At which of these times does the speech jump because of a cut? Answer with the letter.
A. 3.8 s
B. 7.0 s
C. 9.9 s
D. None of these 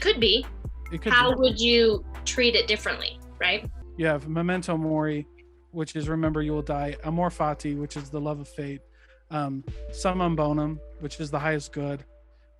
A